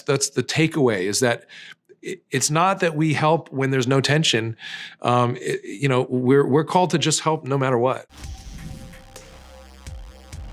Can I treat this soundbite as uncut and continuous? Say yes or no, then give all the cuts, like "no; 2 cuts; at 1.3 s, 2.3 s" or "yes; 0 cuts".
no; 1 cut; at 8.1 s